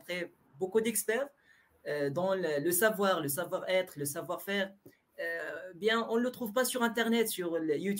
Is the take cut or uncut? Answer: uncut